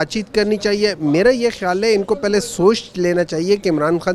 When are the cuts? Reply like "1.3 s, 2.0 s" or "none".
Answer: none

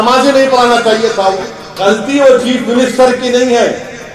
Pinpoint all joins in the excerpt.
1.7 s

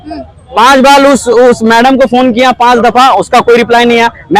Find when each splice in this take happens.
none

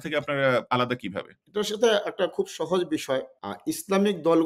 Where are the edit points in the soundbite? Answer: none

